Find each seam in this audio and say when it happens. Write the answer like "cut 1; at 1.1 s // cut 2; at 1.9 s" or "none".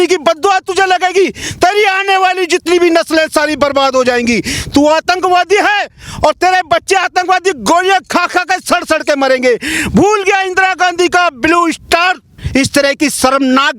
cut 1; at 12.3 s

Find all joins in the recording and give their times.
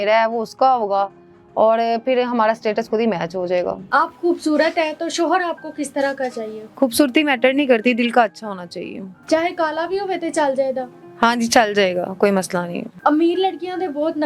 none

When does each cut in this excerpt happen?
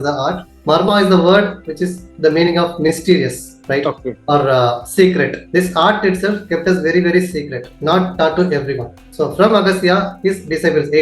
none

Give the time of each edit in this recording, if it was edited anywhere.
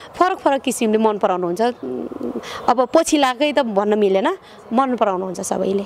none

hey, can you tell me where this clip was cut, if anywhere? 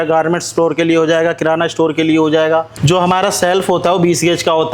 cut 1; at 2.7 s

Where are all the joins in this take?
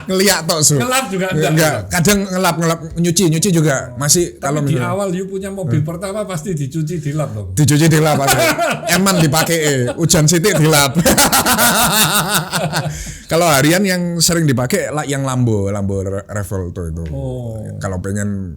none

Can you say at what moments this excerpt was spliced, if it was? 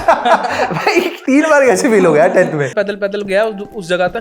cut 1; at 1.2 s // cut 2; at 2.7 s

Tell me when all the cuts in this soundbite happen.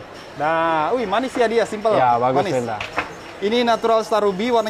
none

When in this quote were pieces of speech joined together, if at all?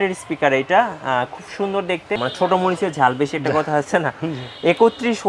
cut 1; at 2.2 s

